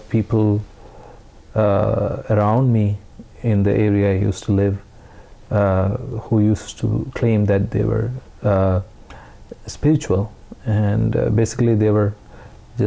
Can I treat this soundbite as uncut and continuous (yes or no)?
yes